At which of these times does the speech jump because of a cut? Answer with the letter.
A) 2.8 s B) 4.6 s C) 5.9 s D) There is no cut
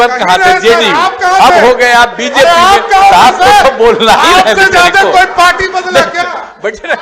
D